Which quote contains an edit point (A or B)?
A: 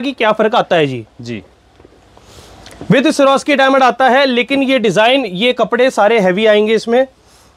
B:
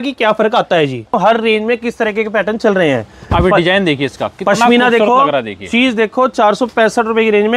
B